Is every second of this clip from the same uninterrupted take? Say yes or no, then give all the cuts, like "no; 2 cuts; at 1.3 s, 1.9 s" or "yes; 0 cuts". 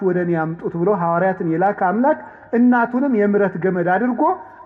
yes; 0 cuts